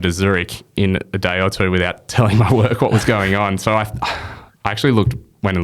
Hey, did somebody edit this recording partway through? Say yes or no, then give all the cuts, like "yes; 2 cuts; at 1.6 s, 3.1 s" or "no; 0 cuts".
no; 0 cuts